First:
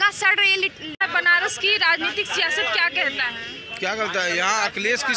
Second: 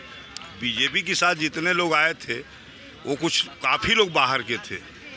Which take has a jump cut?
first; 1 cut; at 1.0 s

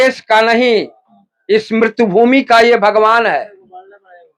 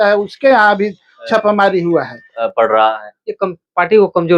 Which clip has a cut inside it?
second; 1 cut; at 2.4 s

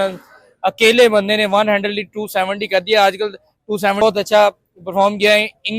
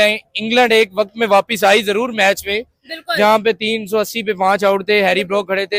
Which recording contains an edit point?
first; 1 cut; at 4.0 s

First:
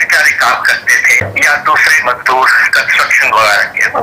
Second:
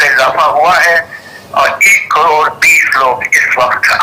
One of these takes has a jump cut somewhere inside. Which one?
first; 1 cut; at 1.3 s

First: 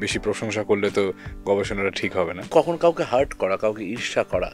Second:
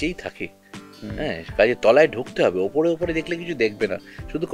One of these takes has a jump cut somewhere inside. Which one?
first; 1 cut; at 2.5 s

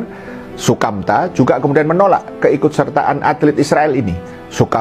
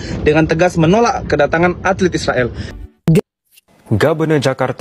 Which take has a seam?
second; 1 cut; at 2.7 s

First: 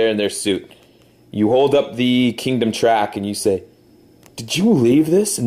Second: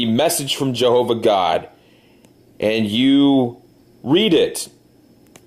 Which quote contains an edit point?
second; 1 cut; at 2.4 s

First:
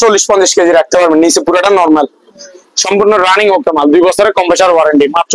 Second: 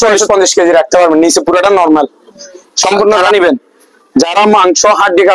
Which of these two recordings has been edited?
second; 1 cut; at 3.3 s

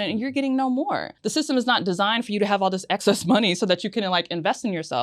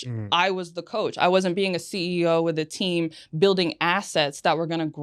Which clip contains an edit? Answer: first; 1 cut; at 1.1 s

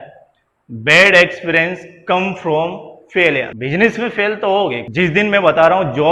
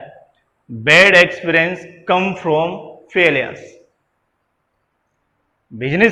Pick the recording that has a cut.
first; 2 cuts; at 3.5 s, 4.8 s

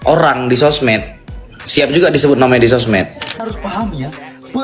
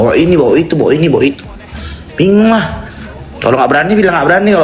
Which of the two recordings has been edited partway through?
first; 1 cut; at 3.3 s

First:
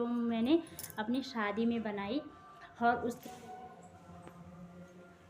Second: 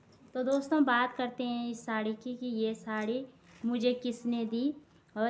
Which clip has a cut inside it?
first; 1 cut; at 3.2 s

